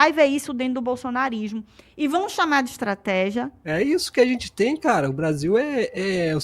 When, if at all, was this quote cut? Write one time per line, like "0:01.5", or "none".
0:03.6